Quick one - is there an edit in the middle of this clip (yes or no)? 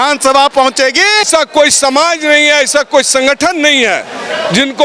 yes